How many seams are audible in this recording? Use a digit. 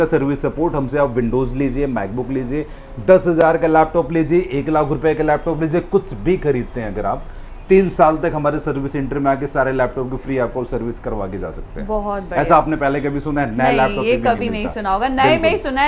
0